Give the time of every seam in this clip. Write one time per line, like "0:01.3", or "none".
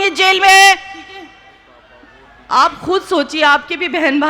0:01.6